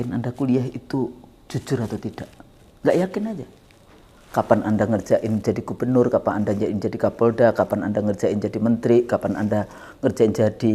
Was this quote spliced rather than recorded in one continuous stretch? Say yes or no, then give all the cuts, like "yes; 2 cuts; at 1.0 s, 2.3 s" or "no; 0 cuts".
no; 0 cuts